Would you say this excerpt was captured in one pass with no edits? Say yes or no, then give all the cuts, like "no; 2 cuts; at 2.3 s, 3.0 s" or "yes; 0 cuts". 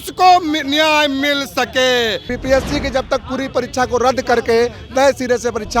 no; 1 cut; at 2.3 s